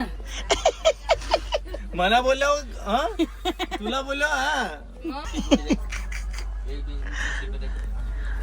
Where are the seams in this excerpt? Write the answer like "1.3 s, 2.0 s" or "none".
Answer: 5.2 s